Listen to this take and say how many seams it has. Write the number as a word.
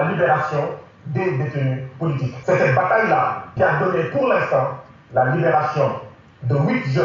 two